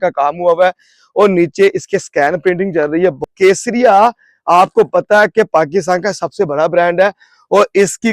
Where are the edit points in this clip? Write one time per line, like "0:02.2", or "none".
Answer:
0:03.3